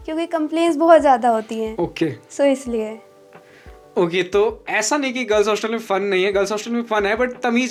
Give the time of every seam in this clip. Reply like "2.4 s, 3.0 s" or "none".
none